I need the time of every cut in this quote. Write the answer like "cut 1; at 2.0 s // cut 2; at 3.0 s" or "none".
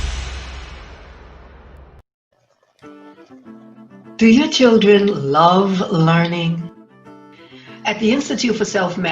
cut 1; at 1.8 s